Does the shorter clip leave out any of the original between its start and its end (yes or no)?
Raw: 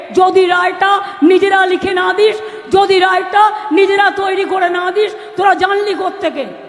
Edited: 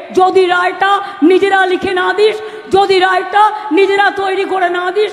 no